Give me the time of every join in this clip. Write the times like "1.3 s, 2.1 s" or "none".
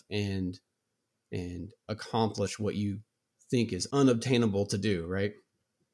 3.8 s